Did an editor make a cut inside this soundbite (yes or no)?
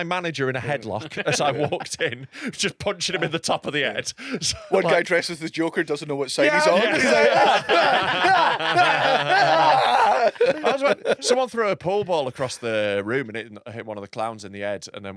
no